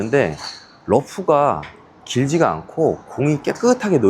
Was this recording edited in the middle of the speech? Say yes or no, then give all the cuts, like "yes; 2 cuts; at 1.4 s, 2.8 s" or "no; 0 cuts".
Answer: no; 0 cuts